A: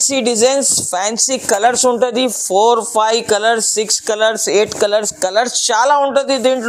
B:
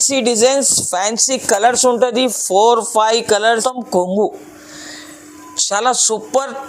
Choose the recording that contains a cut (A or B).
B